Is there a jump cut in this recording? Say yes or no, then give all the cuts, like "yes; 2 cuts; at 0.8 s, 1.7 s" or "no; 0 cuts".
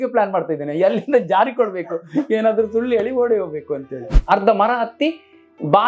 yes; 1 cut; at 4.1 s